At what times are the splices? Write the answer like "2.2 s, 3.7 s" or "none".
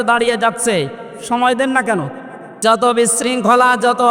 2.6 s

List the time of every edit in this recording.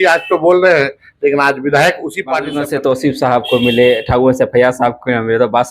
2.5 s

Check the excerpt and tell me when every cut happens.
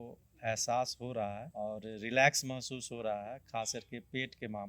1.5 s

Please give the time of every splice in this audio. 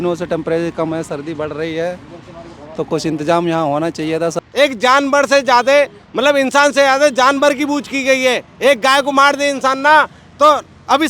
4.4 s

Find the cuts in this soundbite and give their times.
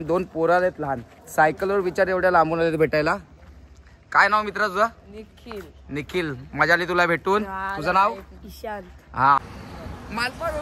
9.4 s

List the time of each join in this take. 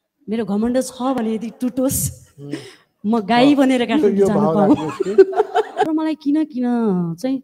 5.9 s

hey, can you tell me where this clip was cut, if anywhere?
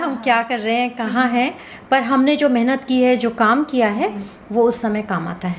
none

